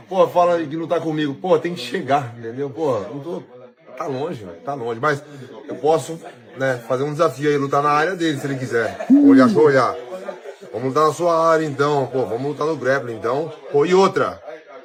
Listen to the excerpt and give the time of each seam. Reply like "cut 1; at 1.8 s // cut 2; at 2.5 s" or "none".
none